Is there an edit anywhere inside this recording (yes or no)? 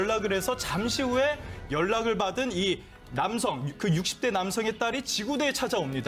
yes